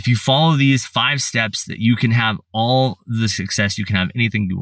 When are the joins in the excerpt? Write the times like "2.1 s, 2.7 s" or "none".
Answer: none